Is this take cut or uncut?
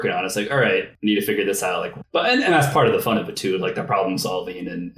cut